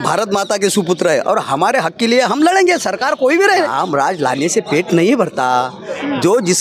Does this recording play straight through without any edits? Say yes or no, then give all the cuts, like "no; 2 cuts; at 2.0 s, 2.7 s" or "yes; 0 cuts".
no; 1 cut; at 3.7 s